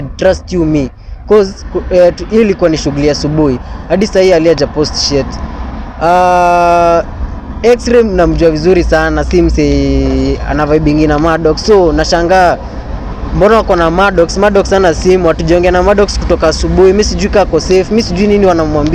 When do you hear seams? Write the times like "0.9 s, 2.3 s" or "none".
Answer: none

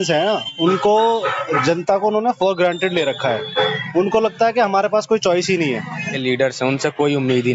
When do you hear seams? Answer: 6.1 s

